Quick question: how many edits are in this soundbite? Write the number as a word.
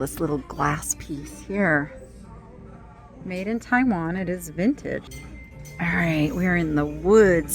one